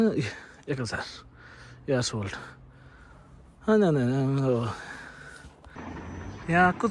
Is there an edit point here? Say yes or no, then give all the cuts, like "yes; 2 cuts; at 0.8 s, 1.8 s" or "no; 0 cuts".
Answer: yes; 1 cut; at 5.8 s